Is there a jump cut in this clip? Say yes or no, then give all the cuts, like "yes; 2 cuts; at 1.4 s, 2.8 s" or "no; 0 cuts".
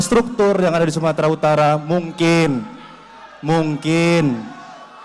no; 0 cuts